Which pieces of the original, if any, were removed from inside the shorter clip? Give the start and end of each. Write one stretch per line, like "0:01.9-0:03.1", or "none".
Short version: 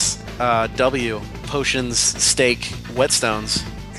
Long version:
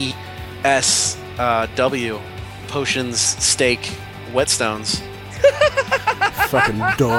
0:02.3-0:02.5
0:04.0-0:04.1